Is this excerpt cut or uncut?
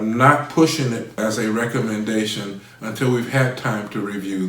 cut